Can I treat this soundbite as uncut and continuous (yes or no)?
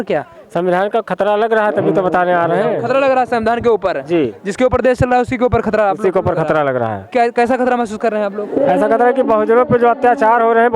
yes